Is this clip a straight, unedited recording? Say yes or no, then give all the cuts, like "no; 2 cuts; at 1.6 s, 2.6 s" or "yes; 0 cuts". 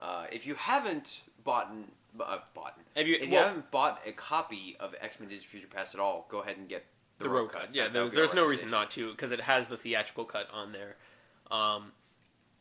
yes; 0 cuts